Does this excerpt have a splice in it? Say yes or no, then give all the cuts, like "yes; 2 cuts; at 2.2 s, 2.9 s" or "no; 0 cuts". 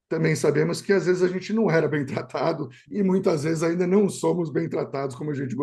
no; 0 cuts